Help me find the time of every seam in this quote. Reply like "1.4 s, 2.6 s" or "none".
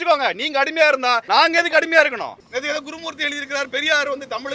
1.2 s, 2.4 s